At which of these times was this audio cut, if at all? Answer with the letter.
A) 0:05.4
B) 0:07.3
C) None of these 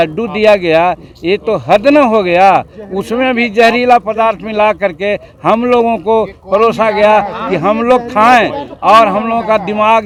C